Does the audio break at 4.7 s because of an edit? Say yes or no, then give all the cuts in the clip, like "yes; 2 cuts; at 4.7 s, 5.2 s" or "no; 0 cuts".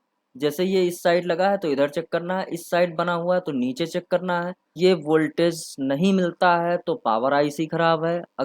yes; 1 cut; at 4.7 s